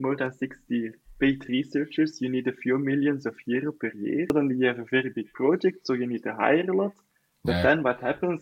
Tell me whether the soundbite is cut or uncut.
cut